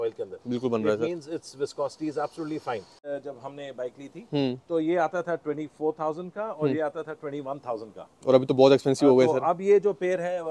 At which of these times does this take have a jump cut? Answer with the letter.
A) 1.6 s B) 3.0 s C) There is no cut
B